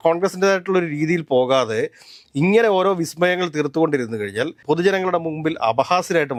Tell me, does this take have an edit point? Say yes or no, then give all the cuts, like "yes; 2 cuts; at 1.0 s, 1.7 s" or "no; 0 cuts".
no; 0 cuts